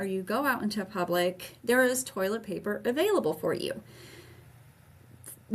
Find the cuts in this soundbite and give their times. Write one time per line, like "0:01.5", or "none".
none